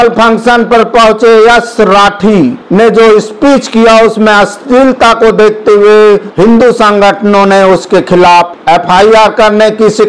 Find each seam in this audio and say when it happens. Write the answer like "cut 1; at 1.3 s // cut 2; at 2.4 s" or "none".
none

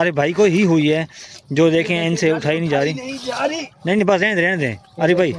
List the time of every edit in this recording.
none

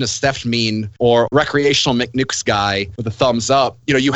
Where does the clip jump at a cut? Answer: cut 1; at 1.2 s // cut 2; at 3.0 s

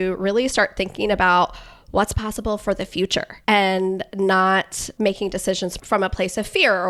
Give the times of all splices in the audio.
cut 1; at 3.3 s // cut 2; at 4.9 s // cut 3; at 5.8 s

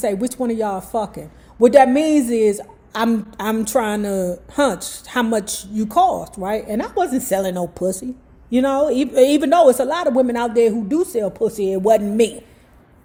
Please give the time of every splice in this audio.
none

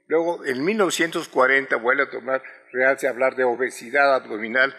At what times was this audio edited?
cut 1; at 2.0 s

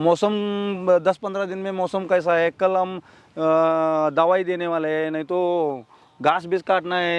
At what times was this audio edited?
none

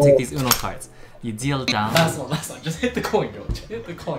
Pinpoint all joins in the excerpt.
cut 1; at 2.0 s

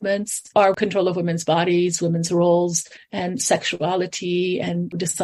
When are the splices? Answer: none

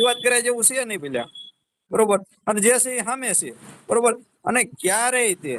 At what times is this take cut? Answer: none

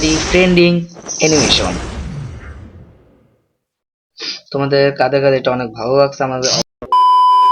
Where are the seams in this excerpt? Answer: cut 1; at 6.6 s

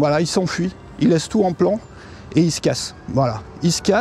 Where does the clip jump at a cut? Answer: none

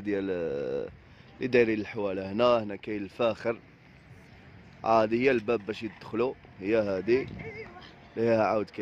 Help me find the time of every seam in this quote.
none

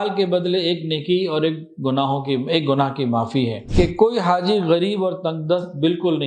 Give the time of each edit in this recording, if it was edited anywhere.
cut 1; at 3.6 s

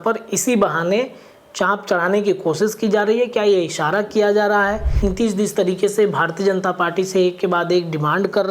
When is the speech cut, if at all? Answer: cut 1; at 4.9 s

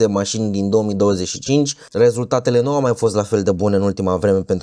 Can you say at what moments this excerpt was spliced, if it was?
cut 1; at 1.8 s

